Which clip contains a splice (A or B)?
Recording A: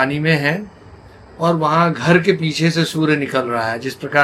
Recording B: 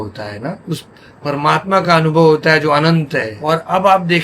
B